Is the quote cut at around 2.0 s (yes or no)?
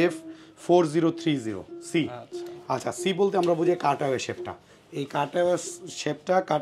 no